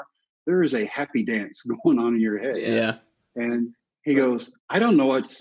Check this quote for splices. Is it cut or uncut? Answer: cut